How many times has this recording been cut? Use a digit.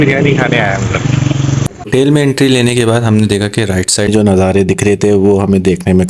2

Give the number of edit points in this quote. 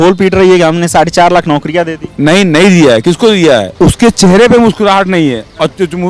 1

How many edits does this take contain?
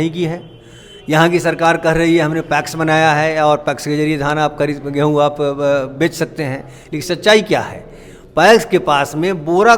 0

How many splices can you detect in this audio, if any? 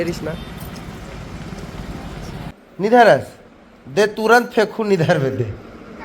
1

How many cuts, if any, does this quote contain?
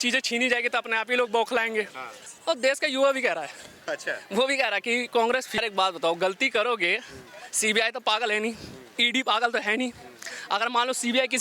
2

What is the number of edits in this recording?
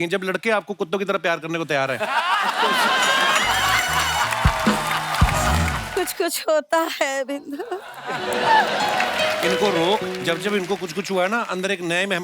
1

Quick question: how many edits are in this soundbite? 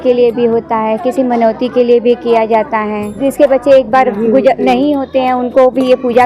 1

